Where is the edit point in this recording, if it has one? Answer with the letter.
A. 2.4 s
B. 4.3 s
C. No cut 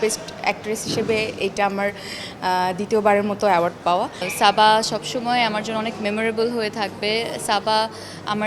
B